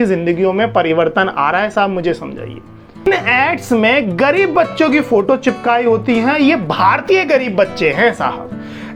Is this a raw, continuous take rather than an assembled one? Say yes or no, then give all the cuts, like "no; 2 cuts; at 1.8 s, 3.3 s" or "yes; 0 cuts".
no; 1 cut; at 3.1 s